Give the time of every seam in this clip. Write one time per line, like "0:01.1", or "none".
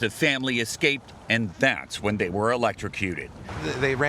0:03.0